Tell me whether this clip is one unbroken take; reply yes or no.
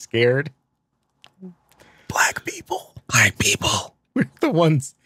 no